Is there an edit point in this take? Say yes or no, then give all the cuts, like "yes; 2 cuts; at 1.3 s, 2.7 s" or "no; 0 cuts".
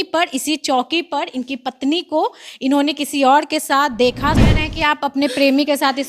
yes; 1 cut; at 4.4 s